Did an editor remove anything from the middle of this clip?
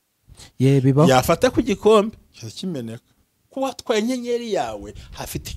yes; 1 cut; at 3.5 s

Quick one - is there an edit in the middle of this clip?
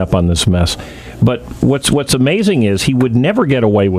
no; 0 cuts

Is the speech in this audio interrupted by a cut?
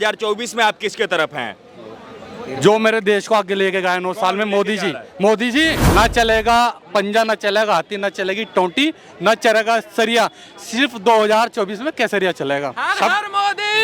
yes; 2 cuts; at 5.8 s, 12.8 s

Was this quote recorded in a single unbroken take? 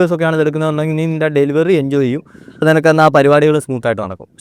no; 1 cut; at 2.6 s

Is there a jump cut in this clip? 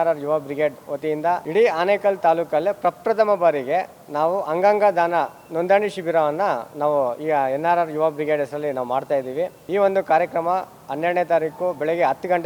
yes; 2 cuts; at 1.4 s, 9.6 s

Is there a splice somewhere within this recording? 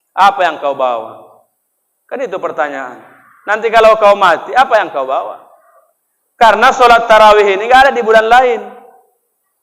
no; 0 cuts

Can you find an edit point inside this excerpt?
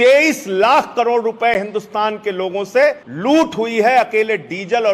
yes; 1 cut; at 3.1 s

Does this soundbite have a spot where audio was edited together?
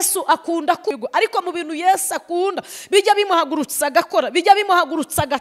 yes; 1 cut; at 1.0 s

